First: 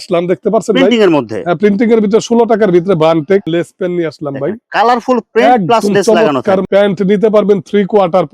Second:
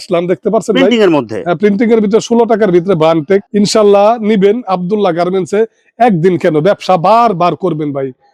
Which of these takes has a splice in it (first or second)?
first